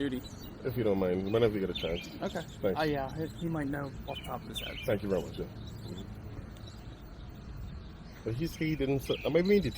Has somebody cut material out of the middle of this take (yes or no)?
yes